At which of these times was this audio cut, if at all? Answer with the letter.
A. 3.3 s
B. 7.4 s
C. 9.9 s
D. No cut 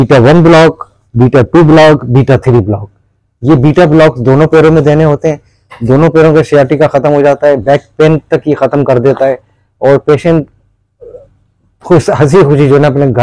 D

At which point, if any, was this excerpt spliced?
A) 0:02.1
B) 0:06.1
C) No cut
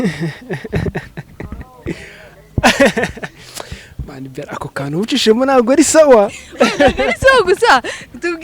C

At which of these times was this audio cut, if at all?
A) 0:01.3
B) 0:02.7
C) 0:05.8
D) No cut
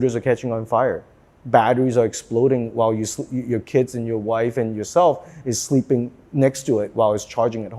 D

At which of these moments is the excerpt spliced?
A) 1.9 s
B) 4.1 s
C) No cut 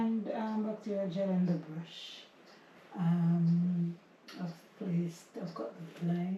C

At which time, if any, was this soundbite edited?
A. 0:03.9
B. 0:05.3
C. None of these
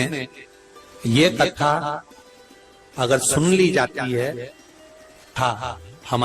B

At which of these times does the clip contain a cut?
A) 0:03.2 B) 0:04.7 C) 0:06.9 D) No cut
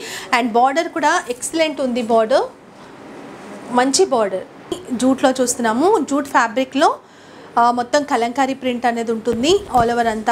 B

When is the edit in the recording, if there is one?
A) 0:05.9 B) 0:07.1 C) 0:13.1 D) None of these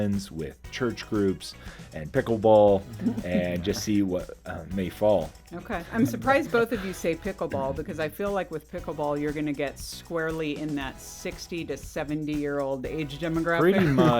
A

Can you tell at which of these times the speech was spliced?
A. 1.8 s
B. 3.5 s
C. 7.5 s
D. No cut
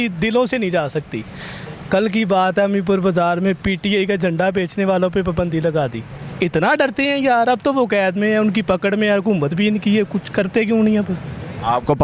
D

